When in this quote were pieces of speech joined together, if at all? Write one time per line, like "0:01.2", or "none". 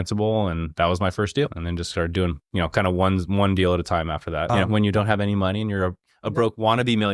0:01.6
0:04.5